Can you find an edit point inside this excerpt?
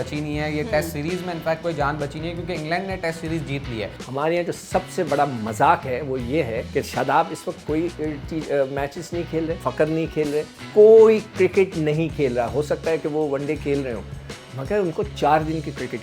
yes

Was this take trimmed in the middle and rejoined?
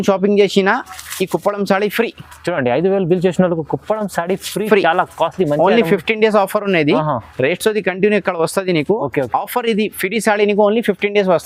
no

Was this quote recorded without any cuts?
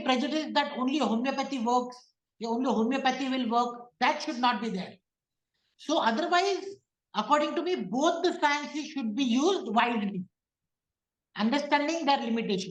yes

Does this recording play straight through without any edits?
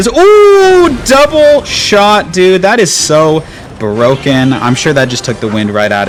yes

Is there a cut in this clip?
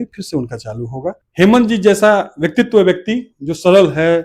yes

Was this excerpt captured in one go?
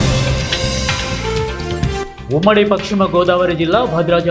yes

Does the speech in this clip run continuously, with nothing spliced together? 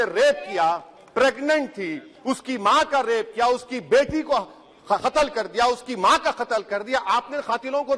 yes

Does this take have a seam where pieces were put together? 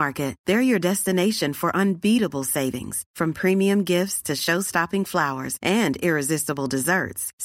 no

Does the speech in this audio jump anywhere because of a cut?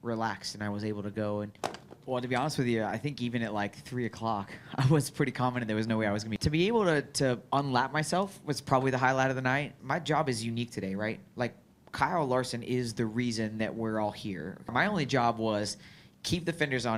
yes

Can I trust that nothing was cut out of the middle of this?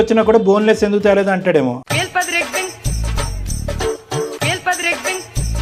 yes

